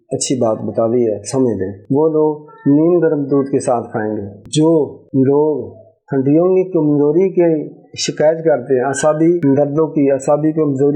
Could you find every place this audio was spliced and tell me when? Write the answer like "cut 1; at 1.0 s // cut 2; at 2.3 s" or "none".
none

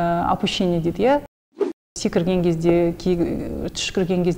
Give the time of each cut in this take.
cut 1; at 1.7 s

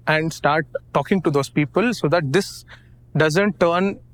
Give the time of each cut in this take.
none

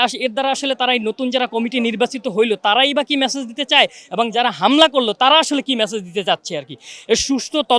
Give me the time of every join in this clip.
none

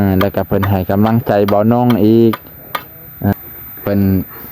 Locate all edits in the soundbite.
cut 1; at 3.3 s

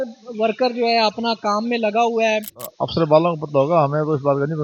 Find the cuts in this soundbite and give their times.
cut 1; at 2.7 s

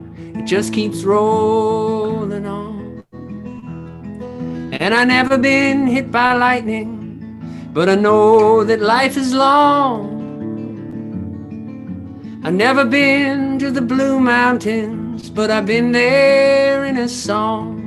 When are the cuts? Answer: none

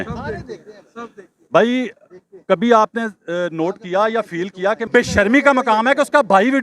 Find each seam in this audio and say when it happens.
cut 1; at 4.8 s

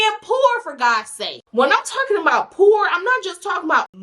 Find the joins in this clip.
cut 1; at 1.4 s

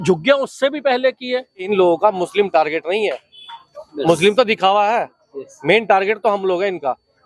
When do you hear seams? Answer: cut 1; at 1.7 s

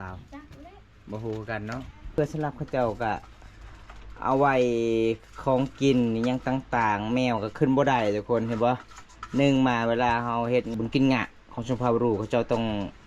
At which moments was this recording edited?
cut 1; at 2.1 s // cut 2; at 10.7 s

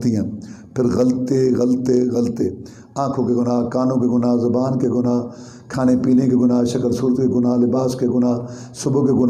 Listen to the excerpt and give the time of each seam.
none

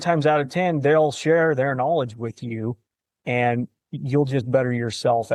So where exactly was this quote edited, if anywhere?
none

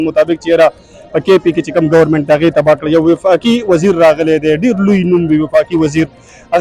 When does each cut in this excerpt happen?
none

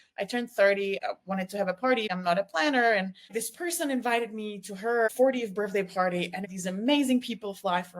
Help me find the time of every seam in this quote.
cut 1; at 1.0 s // cut 2; at 2.1 s // cut 3; at 3.3 s // cut 4; at 5.1 s // cut 5; at 6.5 s

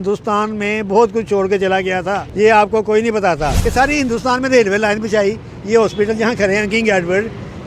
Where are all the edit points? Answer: cut 1; at 2.2 s // cut 2; at 3.6 s

